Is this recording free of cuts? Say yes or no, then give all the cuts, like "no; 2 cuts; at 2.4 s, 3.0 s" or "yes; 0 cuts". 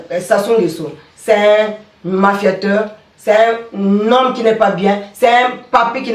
yes; 0 cuts